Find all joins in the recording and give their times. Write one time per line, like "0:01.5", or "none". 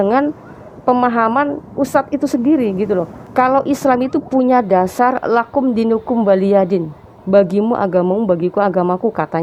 0:03.2